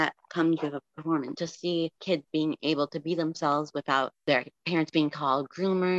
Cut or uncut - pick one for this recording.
cut